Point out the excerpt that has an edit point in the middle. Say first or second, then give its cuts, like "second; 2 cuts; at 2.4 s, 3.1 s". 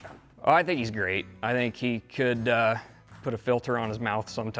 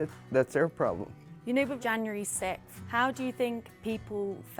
second; 1 cut; at 1.4 s